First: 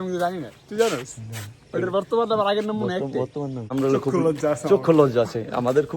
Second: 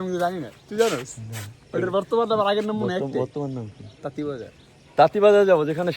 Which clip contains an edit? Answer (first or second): first